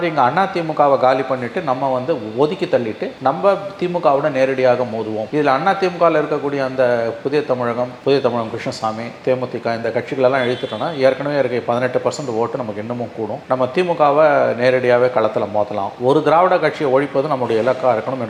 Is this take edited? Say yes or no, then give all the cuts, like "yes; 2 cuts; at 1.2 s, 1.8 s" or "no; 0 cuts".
no; 0 cuts